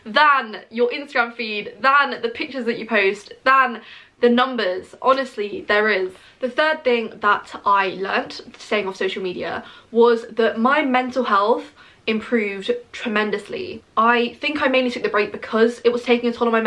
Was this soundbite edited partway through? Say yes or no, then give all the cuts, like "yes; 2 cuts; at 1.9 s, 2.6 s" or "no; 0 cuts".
no; 0 cuts